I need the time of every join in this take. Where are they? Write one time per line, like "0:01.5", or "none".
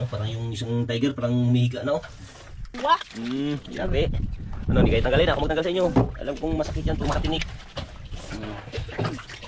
0:02.7

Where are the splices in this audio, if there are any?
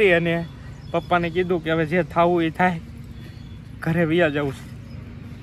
none

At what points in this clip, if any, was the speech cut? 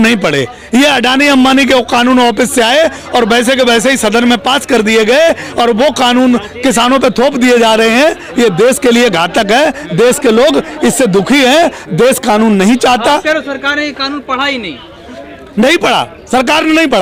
none

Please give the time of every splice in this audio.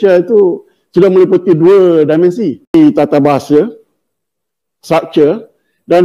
0:02.7

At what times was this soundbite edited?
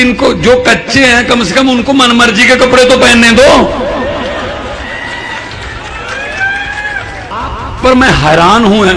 0:07.3

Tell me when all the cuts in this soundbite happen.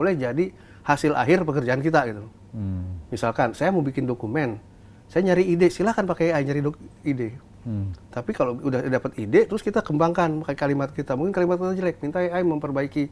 none

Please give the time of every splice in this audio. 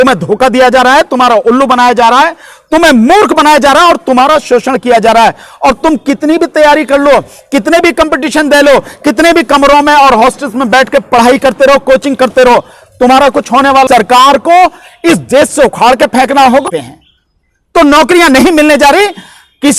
0:13.9
0:16.6

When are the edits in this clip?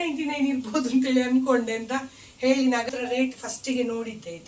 0:02.9

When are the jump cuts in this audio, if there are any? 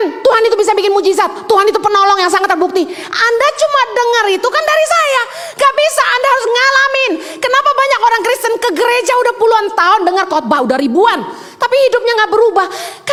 none

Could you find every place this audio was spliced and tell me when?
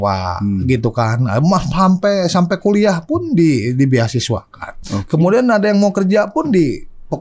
none

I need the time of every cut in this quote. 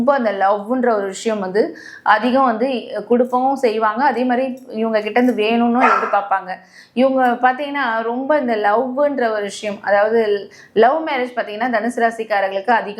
none

